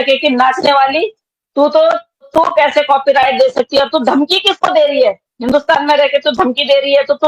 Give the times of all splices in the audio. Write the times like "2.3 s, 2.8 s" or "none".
2.3 s